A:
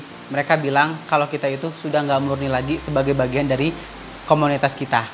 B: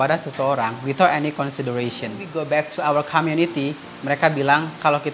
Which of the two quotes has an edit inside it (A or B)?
B